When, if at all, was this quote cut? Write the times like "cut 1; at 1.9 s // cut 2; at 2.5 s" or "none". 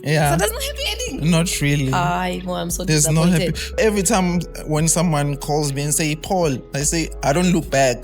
cut 1; at 3.8 s